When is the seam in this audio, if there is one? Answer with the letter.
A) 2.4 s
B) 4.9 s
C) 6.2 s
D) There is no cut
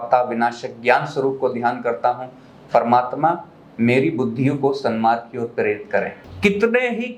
C